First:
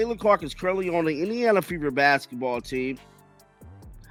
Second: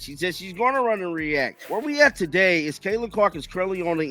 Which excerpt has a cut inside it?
second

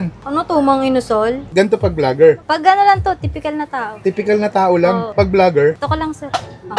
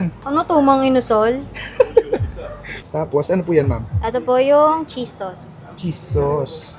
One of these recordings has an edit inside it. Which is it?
first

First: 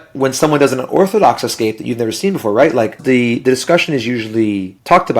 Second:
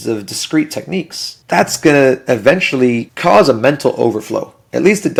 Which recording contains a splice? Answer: first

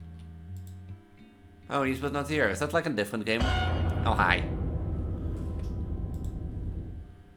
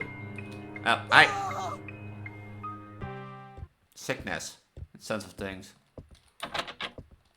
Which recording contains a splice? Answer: second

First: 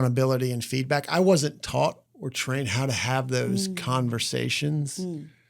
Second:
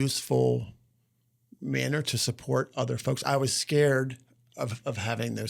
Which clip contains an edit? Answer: first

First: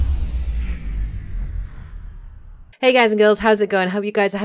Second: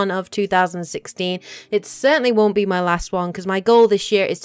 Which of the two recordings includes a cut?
second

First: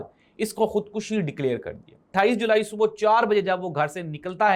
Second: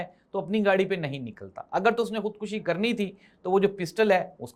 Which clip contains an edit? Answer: first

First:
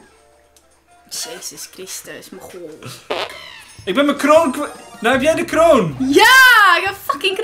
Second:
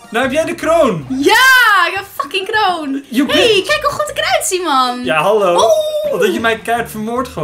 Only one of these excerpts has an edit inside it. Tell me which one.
first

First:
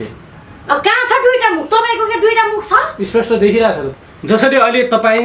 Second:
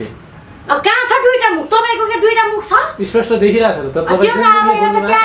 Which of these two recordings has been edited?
first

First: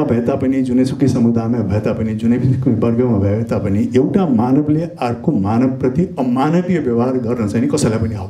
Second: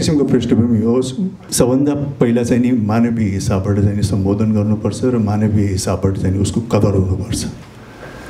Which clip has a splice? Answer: second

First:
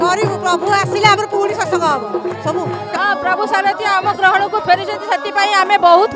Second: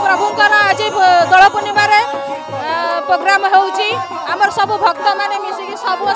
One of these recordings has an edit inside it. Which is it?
first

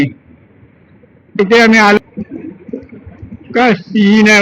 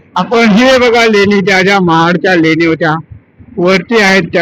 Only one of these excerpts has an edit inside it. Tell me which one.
first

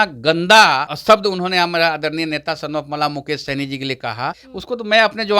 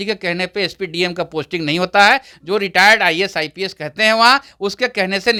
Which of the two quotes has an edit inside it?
first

